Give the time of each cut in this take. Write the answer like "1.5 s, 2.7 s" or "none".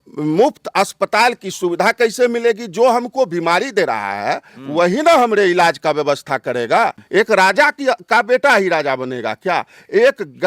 7.0 s